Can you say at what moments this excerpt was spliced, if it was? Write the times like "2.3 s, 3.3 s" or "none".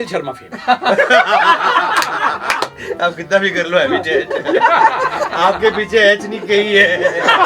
2.7 s